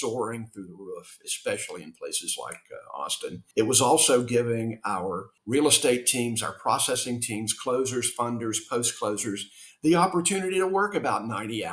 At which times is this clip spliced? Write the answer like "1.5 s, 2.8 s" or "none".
3.4 s, 5.3 s